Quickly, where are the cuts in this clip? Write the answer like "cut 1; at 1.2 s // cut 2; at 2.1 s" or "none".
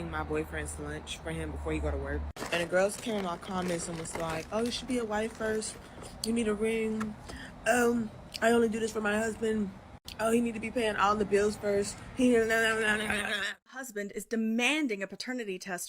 cut 1; at 13.3 s